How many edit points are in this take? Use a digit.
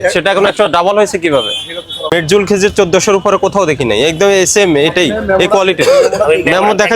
1